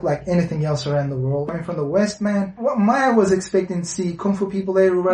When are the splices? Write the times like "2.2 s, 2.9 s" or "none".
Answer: 1.4 s, 2.5 s